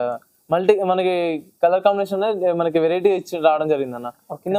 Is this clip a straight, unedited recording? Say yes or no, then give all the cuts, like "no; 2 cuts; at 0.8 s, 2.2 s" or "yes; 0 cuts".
yes; 0 cuts